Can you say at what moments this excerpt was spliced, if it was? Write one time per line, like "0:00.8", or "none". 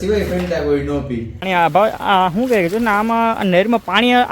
0:01.4